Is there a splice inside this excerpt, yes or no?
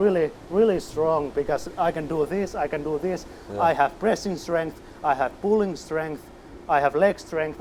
no